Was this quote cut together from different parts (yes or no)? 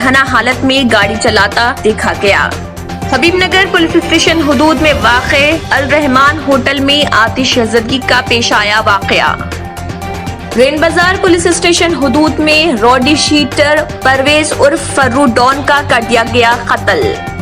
no